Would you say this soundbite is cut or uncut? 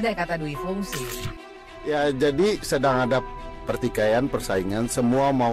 cut